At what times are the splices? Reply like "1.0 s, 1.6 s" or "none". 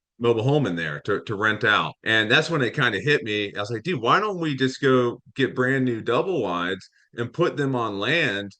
2.0 s